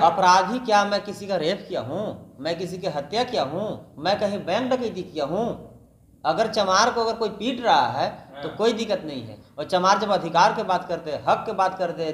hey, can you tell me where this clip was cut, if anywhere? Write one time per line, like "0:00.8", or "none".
none